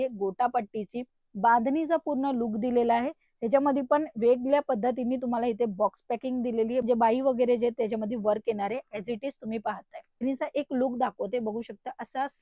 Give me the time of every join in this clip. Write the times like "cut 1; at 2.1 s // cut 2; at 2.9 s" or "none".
cut 1; at 6.8 s // cut 2; at 10.2 s